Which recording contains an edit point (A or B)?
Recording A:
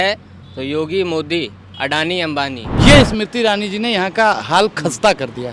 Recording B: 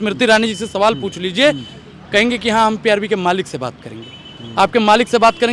A